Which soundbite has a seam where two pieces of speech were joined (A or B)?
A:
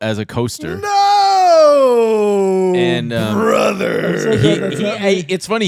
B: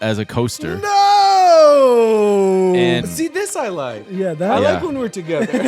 B